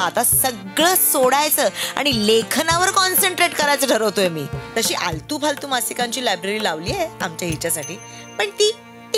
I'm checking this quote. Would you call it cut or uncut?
cut